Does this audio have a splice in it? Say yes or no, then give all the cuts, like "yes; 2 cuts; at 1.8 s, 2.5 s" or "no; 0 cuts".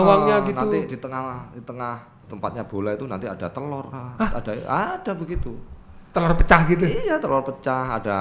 yes; 1 cut; at 2.2 s